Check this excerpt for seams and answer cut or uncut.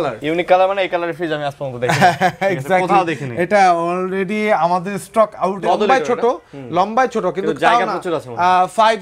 cut